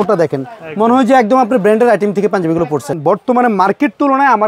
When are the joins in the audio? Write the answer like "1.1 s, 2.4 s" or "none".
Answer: 2.9 s